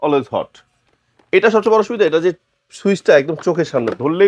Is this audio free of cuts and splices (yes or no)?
yes